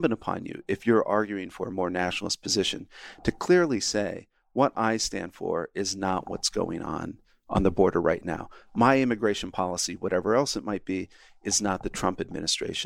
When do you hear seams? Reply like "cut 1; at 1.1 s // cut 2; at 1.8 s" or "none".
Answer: none